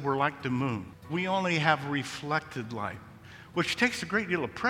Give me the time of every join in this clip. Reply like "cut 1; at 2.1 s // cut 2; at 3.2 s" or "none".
cut 1; at 0.9 s